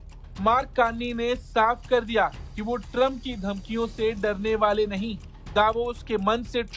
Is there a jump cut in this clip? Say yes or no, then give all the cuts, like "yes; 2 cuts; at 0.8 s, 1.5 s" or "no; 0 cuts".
no; 0 cuts